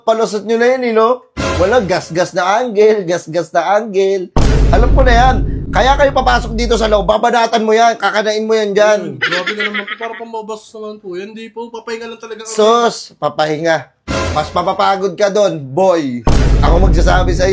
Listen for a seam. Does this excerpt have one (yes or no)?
no